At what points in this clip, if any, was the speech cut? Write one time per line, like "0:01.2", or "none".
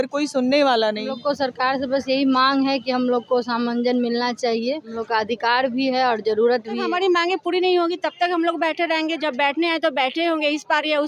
0:01.2
0:04.9
0:06.8